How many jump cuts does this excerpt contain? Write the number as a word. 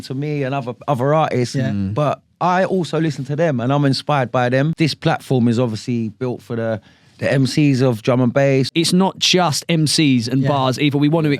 two